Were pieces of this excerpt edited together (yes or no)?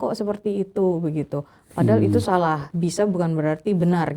yes